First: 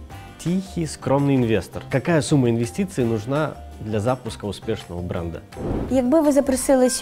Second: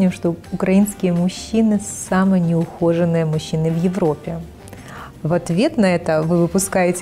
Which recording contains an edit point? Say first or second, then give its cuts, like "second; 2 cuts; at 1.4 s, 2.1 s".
first; 2 cuts; at 1.8 s, 5.8 s